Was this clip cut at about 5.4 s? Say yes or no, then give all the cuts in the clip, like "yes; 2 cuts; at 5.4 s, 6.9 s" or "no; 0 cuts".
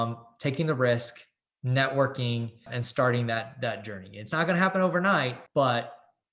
yes; 2 cuts; at 2.8 s, 5.4 s